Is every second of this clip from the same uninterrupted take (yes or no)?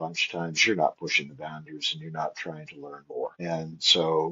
no